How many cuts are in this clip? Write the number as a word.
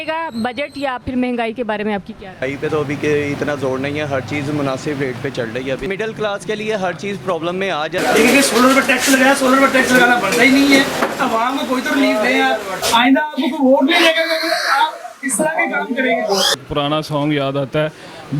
five